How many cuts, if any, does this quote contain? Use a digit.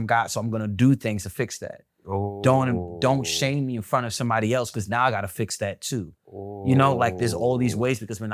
0